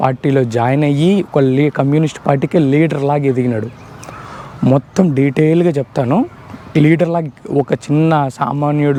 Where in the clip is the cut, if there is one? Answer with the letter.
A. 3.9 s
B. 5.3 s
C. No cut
C